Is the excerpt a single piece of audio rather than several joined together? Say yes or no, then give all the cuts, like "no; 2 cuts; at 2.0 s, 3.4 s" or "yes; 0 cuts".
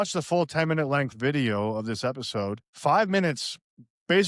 no; 1 cut; at 2.7 s